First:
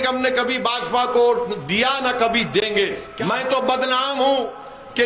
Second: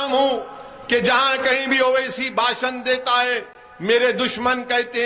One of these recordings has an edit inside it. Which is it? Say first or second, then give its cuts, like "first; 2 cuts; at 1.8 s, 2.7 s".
first; 1 cut; at 3.1 s